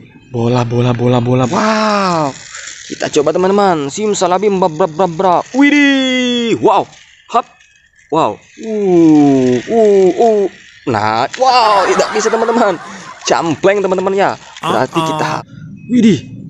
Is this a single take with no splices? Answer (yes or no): no